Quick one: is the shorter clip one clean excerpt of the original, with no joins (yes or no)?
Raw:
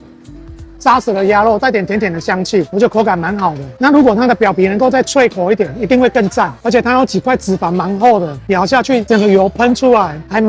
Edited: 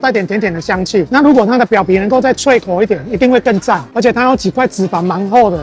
no